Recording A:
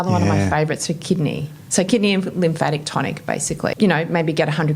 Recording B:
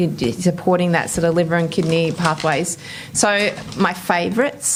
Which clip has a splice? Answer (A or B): A